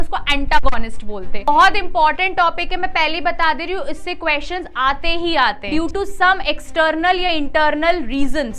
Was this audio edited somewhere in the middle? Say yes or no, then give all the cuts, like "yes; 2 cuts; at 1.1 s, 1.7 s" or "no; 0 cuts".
yes; 2 cuts; at 1.5 s, 5.7 s